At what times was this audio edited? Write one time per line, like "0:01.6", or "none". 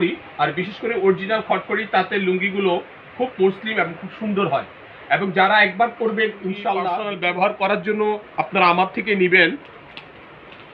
0:07.0